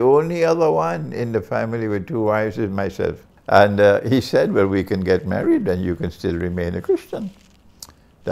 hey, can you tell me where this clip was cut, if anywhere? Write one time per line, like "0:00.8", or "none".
0:03.3